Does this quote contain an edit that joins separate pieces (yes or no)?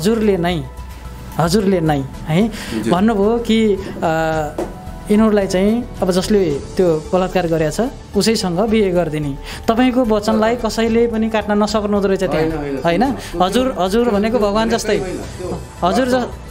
no